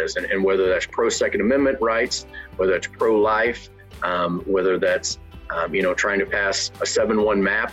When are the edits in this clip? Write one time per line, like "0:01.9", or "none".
none